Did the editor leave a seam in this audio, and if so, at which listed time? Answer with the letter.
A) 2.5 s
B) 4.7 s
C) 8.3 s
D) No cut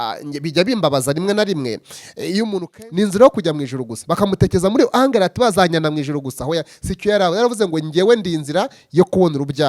A